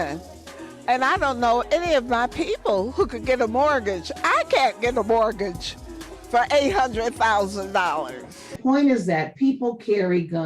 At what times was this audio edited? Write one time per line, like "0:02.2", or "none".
0:08.6